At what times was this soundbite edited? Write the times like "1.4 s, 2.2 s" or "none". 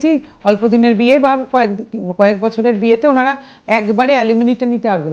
none